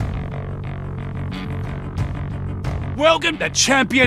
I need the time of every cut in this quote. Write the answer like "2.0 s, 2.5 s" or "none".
2.9 s